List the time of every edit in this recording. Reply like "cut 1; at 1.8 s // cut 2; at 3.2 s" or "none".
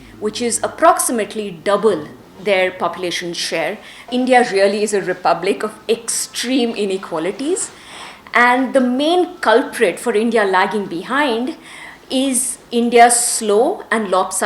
cut 1; at 4.1 s